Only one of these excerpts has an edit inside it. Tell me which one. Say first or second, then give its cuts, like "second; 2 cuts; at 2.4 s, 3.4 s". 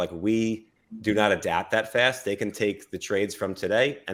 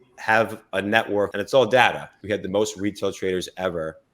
second; 2 cuts; at 1.3 s, 2.1 s